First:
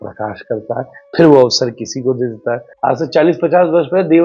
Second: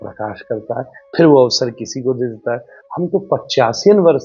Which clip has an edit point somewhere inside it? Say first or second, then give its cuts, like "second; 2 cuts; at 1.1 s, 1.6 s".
first; 1 cut; at 2.7 s